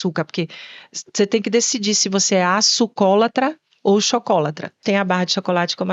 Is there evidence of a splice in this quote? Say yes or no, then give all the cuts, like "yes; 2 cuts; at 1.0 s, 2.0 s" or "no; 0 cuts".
yes; 1 cut; at 4.8 s